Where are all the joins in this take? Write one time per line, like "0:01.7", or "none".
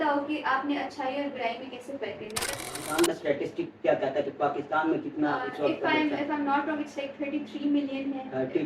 0:02.6